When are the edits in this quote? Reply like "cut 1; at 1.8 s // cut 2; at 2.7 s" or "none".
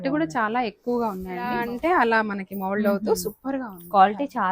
cut 1; at 1.6 s